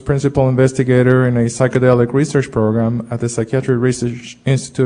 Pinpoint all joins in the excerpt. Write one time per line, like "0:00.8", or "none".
0:02.3